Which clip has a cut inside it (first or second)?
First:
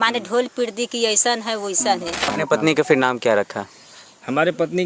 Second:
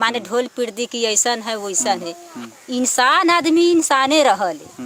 first